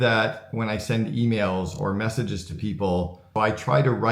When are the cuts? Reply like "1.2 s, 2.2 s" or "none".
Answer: 3.2 s